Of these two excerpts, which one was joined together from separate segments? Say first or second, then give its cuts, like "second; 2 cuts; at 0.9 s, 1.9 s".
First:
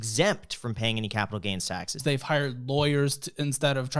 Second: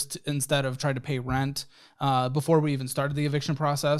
first; 1 cut; at 2.0 s